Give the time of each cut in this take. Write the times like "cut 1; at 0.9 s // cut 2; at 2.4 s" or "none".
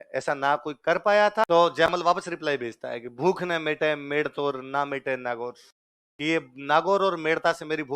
cut 1; at 1.4 s